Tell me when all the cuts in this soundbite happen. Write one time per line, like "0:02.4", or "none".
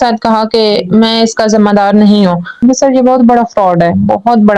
0:02.6